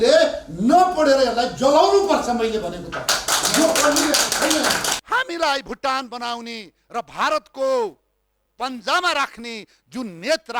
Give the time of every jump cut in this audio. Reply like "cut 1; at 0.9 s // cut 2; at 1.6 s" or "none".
cut 1; at 5.0 s